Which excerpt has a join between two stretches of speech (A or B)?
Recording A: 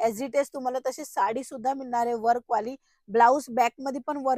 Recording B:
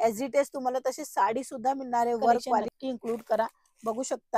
B